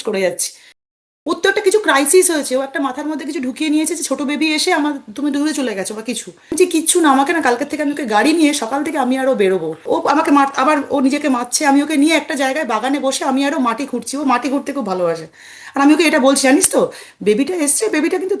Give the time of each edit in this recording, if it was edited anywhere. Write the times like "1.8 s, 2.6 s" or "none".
0.9 s, 6.6 s, 9.7 s